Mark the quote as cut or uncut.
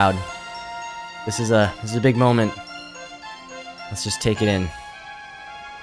cut